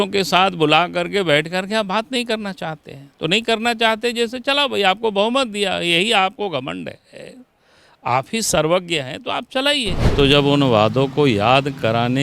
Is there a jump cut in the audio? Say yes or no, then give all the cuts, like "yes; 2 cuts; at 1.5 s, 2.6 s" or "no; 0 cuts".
yes; 1 cut; at 10.1 s